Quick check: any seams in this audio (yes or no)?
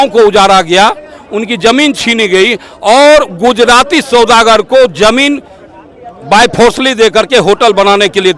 no